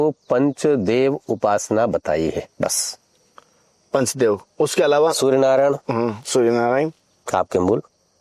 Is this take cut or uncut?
uncut